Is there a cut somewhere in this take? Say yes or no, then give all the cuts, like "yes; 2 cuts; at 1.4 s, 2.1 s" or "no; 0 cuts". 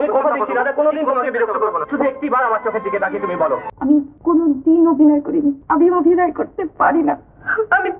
yes; 2 cuts; at 3.7 s, 5.6 s